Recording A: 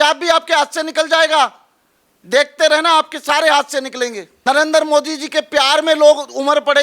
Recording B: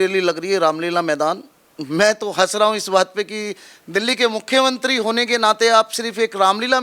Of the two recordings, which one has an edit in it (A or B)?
A